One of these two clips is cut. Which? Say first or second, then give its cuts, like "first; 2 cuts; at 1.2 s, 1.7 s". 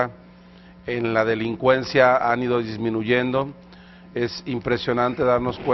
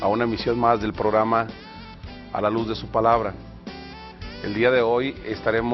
second; 1 cut; at 2.5 s